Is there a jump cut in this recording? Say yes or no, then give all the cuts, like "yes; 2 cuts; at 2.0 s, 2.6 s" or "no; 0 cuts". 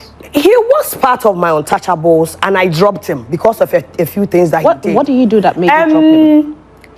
no; 0 cuts